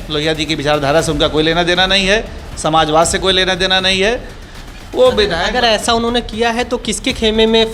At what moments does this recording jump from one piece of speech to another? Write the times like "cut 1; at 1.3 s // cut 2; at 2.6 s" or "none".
none